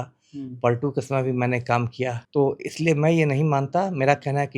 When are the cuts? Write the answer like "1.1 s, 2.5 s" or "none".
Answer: 2.2 s